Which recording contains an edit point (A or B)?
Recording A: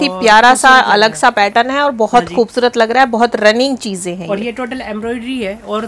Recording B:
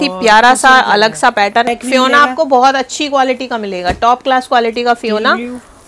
B